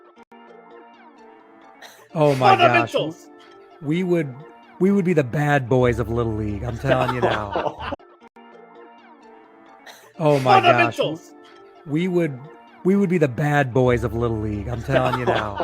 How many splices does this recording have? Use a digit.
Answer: 1